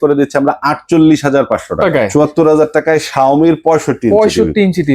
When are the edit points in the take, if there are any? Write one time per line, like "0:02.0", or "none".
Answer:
0:02.1

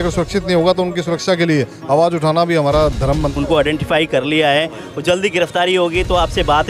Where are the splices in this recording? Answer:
0:03.3

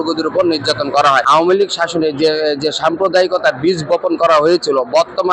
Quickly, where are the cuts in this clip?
0:01.2

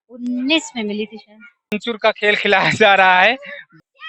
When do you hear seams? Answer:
0:01.8

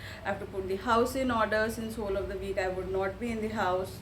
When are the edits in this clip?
none

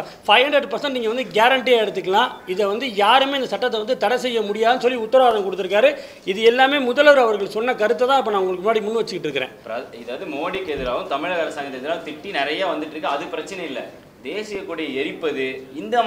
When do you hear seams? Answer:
0:09.3

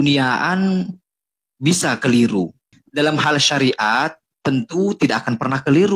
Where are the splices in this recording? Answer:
0:02.8

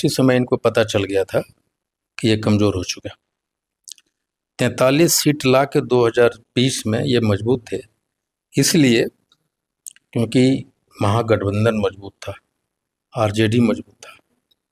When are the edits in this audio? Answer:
none

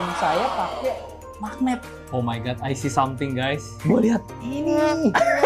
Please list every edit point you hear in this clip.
0:02.0
0:03.7

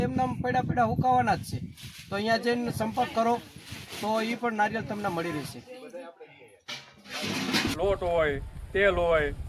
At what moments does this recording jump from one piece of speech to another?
0:07.7

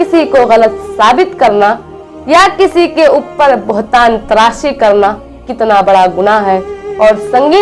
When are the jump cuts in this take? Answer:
none

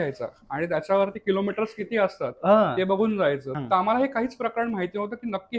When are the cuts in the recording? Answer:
0:03.5

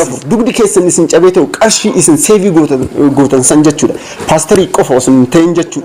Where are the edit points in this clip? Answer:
none

